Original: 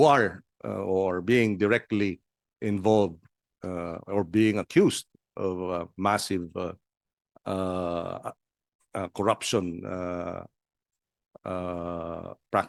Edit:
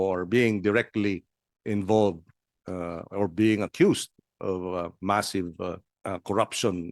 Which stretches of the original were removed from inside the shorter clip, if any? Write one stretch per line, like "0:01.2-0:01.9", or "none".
0:06.9-0:08.8